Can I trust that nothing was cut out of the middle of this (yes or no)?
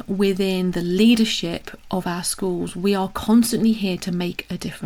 yes